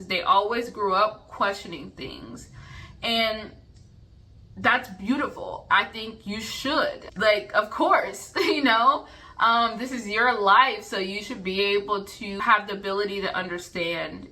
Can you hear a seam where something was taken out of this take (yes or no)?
yes